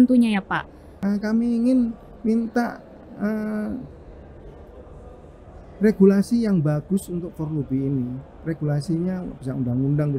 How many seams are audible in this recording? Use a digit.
1